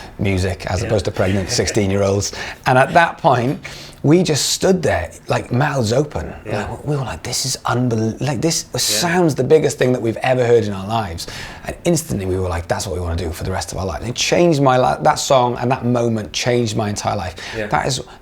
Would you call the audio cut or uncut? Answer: uncut